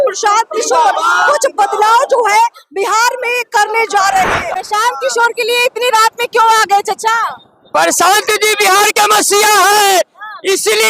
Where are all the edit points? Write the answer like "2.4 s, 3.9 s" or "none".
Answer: 4.5 s